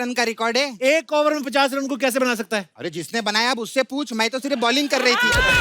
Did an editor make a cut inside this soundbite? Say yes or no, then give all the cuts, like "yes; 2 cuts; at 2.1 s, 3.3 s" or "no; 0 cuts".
yes; 1 cut; at 2.7 s